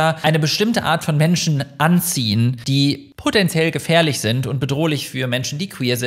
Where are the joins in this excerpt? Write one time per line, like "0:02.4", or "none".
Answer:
0:02.6